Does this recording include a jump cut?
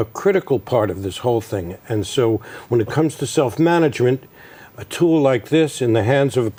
no; 0 cuts

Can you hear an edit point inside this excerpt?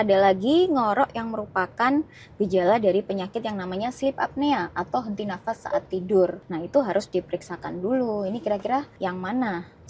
yes; 2 cuts; at 6.5 s, 8.9 s

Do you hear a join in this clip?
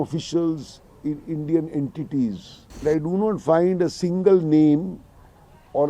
yes; 1 cut; at 2.8 s

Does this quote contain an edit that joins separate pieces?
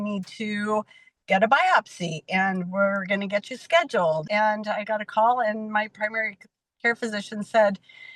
yes; 1 cut; at 4.2 s

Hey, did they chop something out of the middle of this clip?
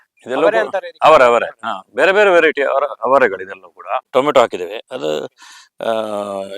yes; 1 cut; at 4.0 s

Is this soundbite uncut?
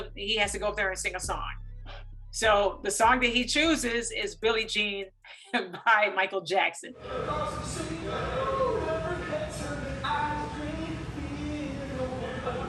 yes; 0 cuts

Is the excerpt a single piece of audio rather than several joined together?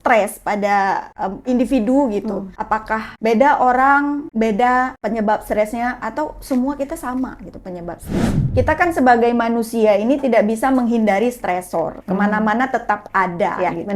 no; 5 cuts; at 1.4 s, 2.8 s, 4.2 s, 5.0 s, 8.4 s

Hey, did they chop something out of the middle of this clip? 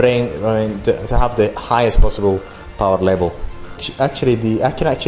no; 0 cuts

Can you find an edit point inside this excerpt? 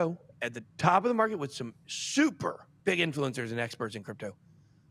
yes; 1 cut; at 2.7 s

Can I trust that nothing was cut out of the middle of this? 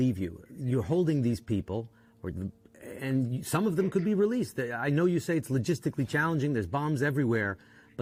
yes; 0 cuts

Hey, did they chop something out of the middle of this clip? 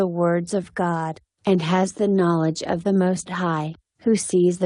no; 0 cuts

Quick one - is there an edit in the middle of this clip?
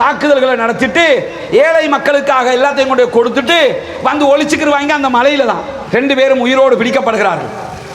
yes; 1 cut; at 5.7 s

